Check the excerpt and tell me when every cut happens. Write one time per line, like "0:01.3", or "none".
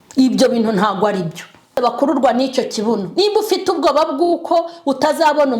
0:01.8